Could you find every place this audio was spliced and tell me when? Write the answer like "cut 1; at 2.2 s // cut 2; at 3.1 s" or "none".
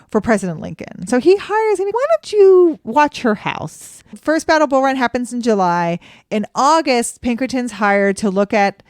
cut 1; at 1.0 s // cut 2; at 1.9 s // cut 3; at 4.1 s